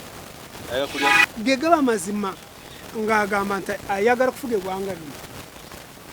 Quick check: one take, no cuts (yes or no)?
no